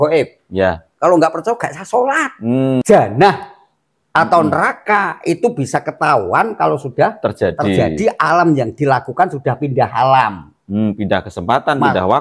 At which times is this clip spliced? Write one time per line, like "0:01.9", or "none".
0:02.8

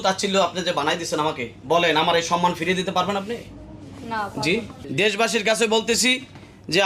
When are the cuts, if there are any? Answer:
0:04.8

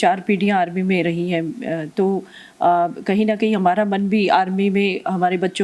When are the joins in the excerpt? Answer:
none

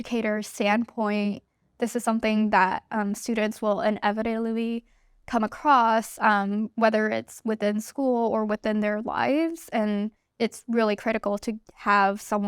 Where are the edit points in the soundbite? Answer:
0:10.2

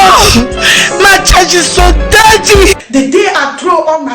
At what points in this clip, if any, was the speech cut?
0:02.8

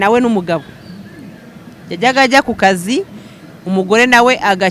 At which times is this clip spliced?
none

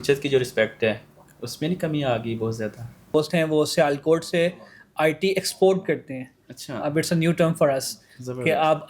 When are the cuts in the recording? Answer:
0:03.1

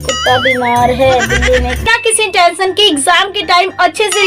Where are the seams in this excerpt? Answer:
0:01.9

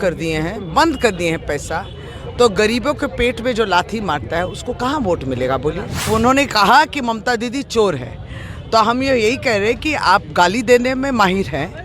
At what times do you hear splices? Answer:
0:06.1

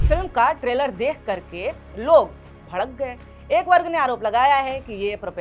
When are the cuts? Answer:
none

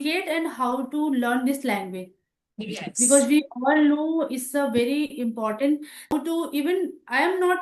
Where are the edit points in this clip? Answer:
0:06.1

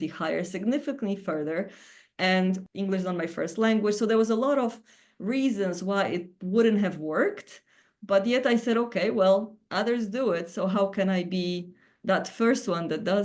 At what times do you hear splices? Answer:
0:02.6

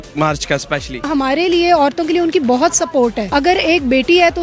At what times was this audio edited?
0:01.0
0:03.2

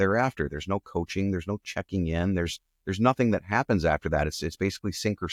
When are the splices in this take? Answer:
none

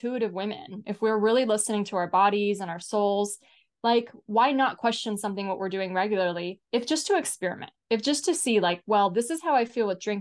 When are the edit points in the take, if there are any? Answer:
none

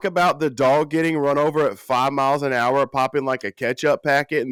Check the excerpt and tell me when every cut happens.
none

